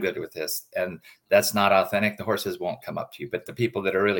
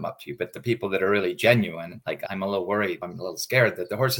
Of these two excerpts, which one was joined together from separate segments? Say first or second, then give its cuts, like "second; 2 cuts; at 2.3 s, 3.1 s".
second; 2 cuts; at 2.2 s, 3.1 s